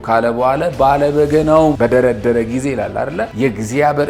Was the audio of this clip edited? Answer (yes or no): yes